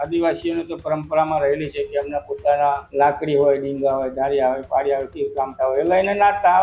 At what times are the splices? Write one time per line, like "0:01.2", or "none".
0:02.8